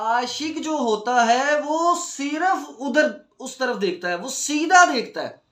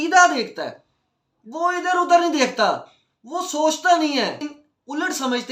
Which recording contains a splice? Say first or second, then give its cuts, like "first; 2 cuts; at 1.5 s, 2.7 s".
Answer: second; 1 cut; at 4.5 s